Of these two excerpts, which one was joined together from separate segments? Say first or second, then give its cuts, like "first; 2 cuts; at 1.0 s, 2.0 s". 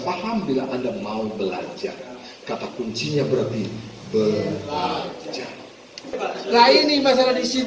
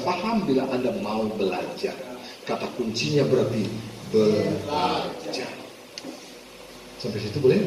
first; 1 cut; at 6.2 s